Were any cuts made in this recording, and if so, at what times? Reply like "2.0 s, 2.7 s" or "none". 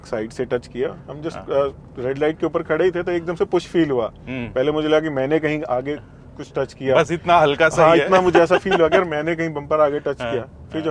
none